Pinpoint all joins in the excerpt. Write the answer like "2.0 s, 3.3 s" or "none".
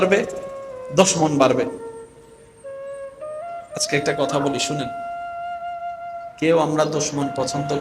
4.7 s, 6.3 s